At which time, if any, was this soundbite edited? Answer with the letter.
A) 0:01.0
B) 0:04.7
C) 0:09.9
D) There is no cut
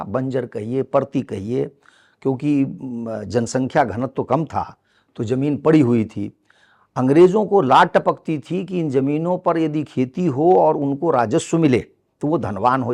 D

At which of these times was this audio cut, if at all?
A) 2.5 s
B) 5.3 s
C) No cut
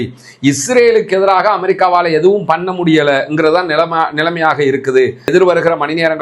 B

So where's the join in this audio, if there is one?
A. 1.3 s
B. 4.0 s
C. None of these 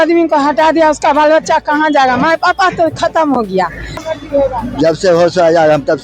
B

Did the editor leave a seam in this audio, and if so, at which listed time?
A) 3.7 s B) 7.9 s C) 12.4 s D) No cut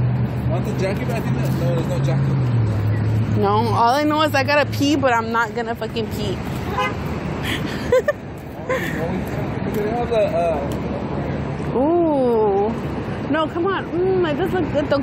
B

